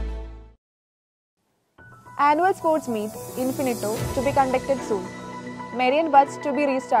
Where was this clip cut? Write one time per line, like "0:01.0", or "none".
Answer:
none